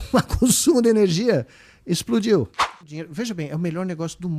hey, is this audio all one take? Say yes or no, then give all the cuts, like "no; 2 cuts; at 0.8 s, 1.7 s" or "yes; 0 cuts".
no; 1 cut; at 2.8 s